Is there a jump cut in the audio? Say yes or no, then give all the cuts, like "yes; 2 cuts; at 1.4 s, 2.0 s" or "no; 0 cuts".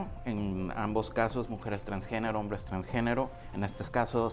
yes; 1 cut; at 3.4 s